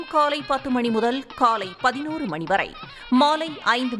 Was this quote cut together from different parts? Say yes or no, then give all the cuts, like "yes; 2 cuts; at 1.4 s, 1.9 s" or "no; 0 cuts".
no; 0 cuts